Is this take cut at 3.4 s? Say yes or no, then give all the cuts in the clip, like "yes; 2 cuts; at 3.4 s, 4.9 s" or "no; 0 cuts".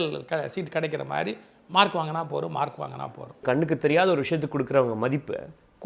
yes; 1 cut; at 3.4 s